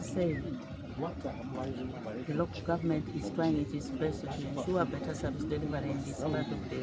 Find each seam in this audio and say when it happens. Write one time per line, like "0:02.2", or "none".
none